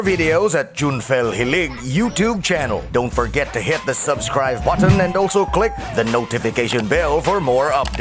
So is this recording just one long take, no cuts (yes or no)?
yes